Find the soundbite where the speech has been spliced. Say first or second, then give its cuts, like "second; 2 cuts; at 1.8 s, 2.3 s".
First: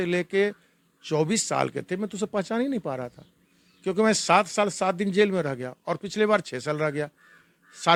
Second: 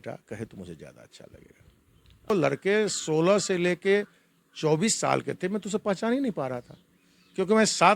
second; 1 cut; at 2.3 s